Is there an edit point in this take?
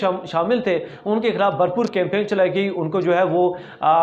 no; 0 cuts

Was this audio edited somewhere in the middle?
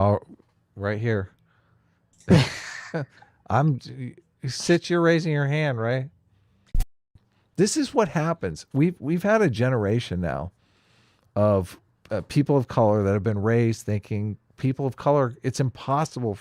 yes; 1 cut; at 6.9 s

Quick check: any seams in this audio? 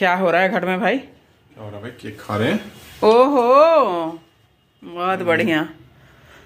no; 0 cuts

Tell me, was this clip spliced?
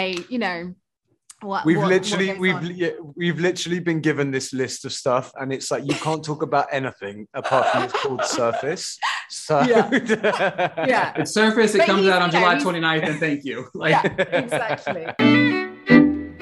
yes; 1 cut; at 15.0 s

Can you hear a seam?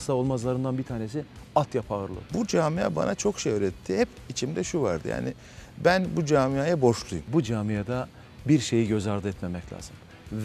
yes; 2 cuts; at 2.3 s, 7.2 s

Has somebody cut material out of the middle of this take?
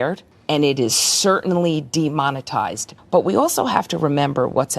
yes; 1 cut; at 2.9 s

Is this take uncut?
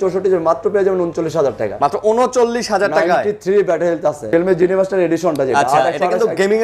no; 1 cut; at 4.2 s

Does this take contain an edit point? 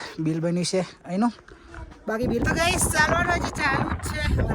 yes; 1 cut; at 2.3 s

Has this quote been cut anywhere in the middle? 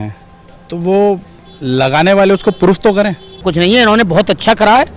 yes; 1 cut; at 3.5 s

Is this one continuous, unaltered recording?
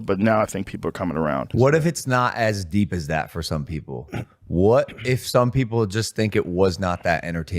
no; 1 cut; at 1.5 s

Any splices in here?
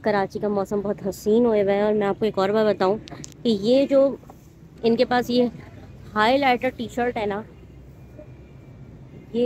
no; 0 cuts

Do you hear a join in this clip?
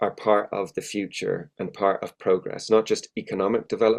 no; 0 cuts

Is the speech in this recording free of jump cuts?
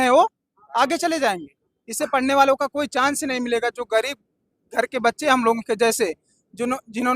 yes; 0 cuts

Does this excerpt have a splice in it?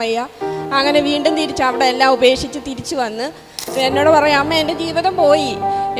yes; 1 cut; at 3.7 s

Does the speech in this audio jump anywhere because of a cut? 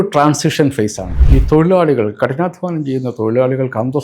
yes; 1 cut; at 1.1 s

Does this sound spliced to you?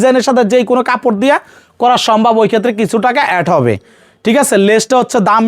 no; 0 cuts

